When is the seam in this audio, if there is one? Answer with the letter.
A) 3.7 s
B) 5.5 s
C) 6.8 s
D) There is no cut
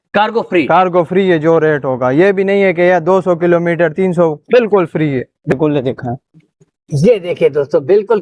B